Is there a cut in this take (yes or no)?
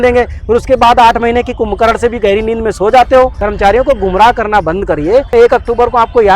yes